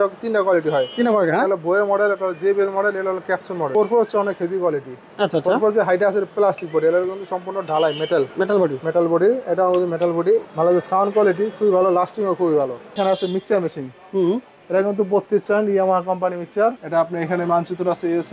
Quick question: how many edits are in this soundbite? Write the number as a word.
four